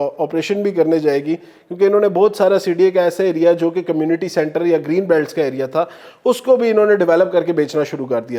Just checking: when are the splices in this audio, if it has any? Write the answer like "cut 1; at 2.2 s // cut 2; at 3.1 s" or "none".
none